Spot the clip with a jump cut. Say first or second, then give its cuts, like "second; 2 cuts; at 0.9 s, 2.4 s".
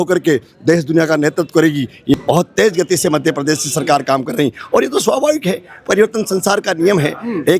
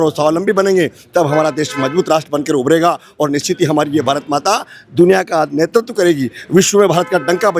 first; 1 cut; at 2.1 s